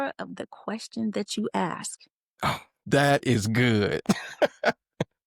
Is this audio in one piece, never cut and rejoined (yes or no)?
no